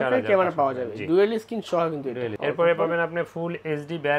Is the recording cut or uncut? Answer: uncut